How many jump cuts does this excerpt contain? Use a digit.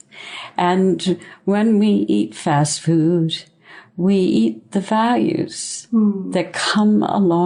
0